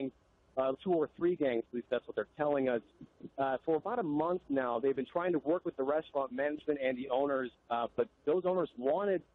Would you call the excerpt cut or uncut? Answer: cut